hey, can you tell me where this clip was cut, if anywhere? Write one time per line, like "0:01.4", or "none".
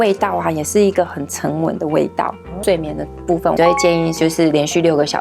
0:02.5
0:03.6